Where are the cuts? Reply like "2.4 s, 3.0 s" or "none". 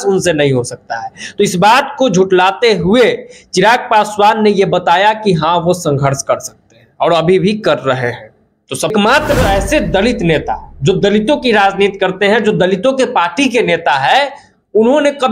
8.9 s

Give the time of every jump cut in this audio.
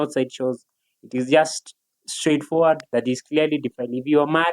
2.9 s

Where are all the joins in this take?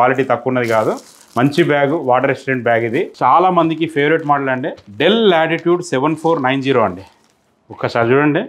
3.1 s

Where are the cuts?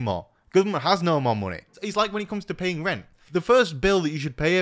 1.8 s, 3.1 s

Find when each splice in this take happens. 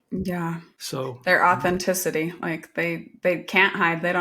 1.2 s

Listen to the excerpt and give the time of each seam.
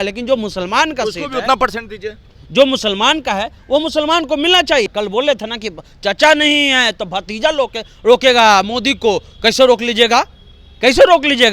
4.9 s

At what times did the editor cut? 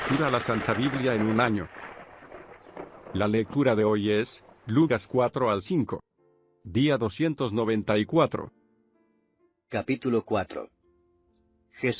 none

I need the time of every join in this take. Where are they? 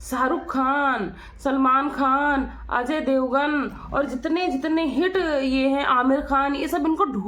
none

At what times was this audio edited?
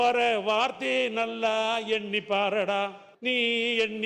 3.1 s

